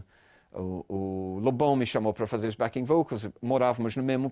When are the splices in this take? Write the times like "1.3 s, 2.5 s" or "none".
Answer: none